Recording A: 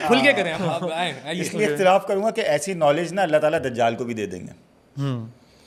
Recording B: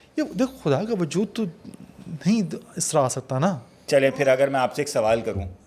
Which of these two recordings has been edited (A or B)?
B